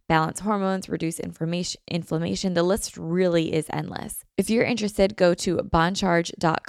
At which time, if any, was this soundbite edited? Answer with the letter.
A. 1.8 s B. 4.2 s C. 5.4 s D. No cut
B